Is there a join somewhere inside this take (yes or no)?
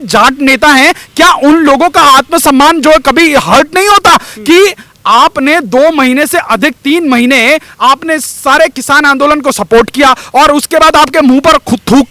no